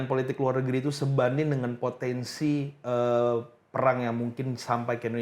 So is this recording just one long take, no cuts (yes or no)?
yes